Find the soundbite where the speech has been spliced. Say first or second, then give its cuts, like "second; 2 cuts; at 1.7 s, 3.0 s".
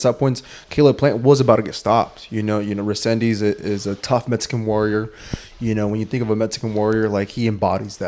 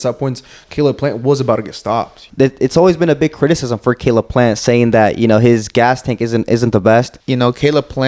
second; 2 cuts; at 2.2 s, 7.2 s